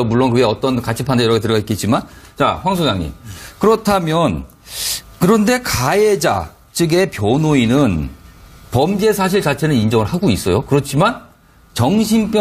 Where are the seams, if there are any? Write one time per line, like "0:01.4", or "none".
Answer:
none